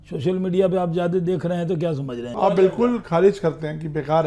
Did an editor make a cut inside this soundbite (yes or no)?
yes